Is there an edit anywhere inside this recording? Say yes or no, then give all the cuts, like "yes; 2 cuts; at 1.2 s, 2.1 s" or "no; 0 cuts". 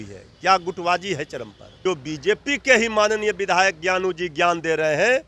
yes; 1 cut; at 1.8 s